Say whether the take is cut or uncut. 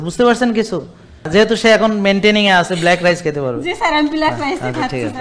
cut